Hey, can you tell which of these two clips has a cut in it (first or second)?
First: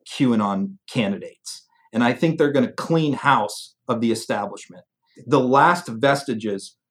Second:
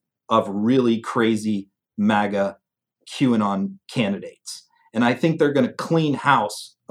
first